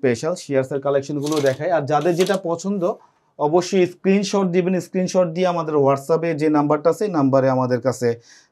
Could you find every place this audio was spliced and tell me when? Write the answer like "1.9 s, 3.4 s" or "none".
none

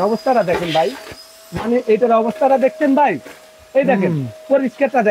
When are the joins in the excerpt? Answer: none

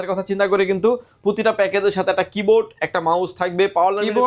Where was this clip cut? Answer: none

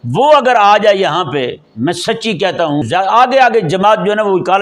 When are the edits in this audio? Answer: 2.8 s

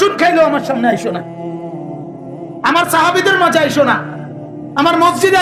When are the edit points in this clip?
none

